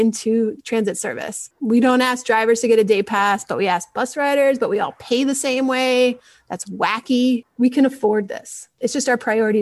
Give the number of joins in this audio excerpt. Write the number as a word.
three